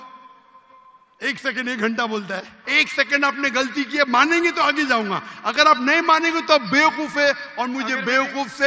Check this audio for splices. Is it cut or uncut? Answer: cut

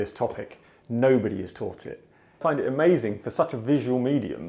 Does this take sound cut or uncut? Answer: cut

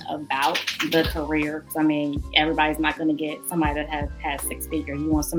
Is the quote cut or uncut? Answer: uncut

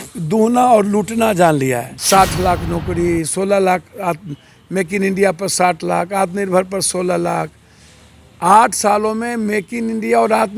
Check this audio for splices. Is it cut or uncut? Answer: cut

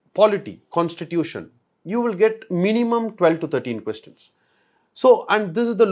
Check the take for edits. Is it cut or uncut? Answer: uncut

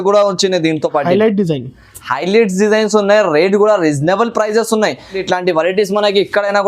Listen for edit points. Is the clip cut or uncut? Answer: cut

